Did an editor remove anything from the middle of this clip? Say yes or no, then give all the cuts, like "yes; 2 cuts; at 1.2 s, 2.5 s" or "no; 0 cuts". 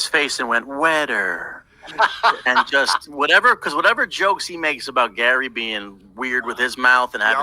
yes; 1 cut; at 5.6 s